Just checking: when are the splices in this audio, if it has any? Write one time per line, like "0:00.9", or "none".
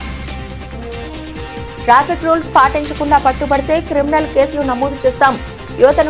none